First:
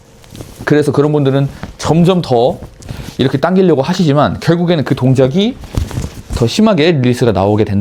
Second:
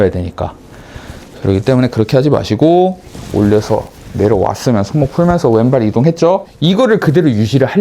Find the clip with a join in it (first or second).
second